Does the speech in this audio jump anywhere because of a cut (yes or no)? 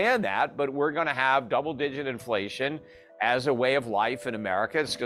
no